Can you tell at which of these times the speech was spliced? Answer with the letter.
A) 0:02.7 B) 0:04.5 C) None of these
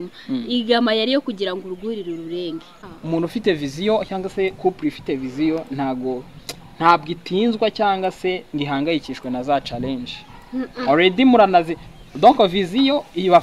A